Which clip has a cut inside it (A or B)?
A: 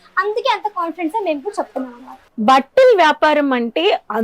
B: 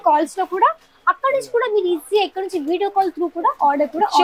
A